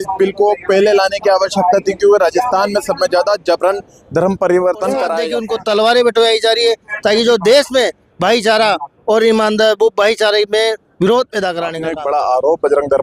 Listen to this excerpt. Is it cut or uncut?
cut